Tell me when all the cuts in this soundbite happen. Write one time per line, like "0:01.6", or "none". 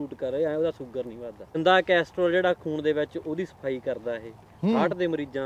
0:01.6